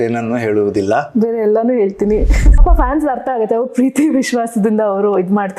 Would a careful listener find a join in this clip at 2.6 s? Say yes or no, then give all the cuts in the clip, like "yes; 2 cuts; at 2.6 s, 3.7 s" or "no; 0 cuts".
yes; 1 cut; at 2.6 s